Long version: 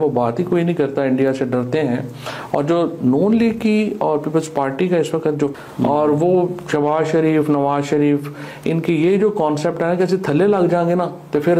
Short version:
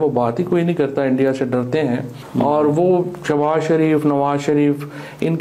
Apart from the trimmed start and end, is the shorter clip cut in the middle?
yes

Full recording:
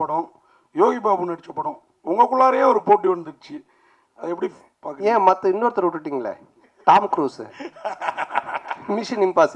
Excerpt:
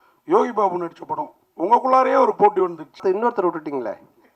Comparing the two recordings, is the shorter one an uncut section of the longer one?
no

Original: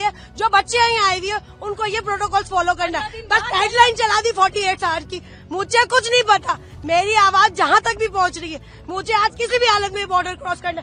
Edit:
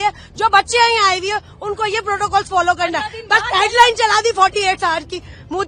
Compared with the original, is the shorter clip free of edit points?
yes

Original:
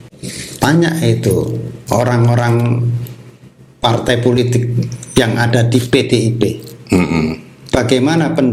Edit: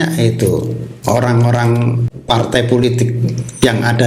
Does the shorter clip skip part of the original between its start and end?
yes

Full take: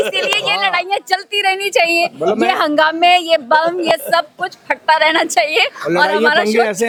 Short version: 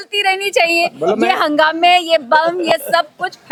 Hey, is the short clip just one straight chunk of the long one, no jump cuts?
yes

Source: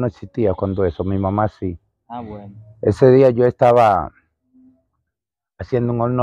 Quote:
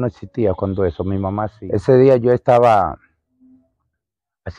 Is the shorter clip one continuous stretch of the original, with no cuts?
no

